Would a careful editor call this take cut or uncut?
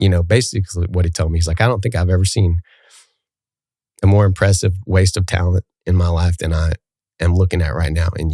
uncut